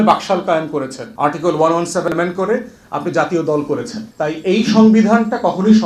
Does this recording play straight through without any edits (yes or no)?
no